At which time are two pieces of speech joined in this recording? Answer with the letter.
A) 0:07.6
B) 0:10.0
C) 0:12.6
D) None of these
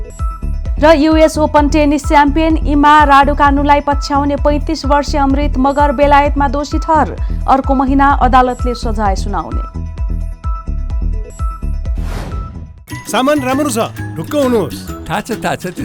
C